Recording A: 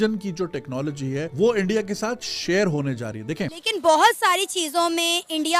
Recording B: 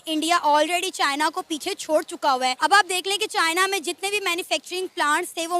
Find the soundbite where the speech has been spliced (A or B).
A